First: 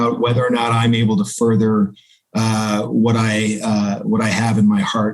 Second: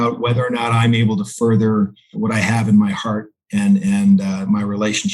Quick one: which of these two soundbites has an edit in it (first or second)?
second